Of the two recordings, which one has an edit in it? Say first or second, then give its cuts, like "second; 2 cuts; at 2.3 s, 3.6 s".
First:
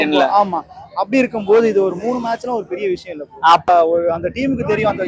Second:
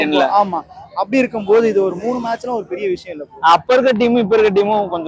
first; 1 cut; at 3.7 s